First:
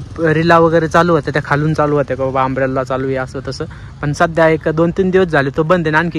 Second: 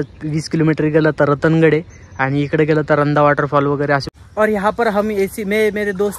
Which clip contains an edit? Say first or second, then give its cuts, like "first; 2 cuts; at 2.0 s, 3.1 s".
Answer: second; 1 cut; at 4.1 s